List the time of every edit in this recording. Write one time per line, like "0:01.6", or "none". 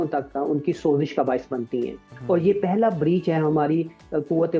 none